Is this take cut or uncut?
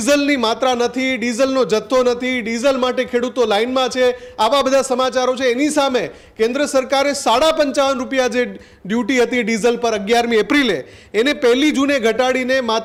uncut